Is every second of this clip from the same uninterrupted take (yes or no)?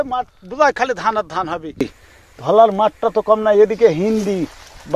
no